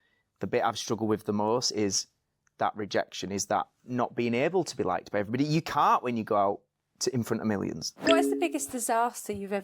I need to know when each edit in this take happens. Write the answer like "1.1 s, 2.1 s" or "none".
7.9 s

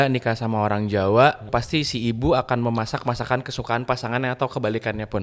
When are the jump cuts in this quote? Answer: 1.5 s

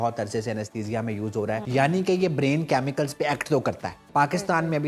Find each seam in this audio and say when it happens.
1.6 s, 3.9 s

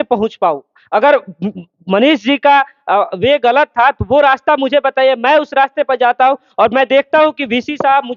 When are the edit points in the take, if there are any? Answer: none

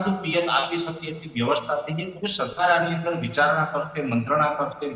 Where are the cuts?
2.1 s

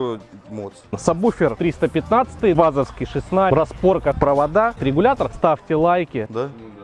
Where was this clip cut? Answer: 5.3 s

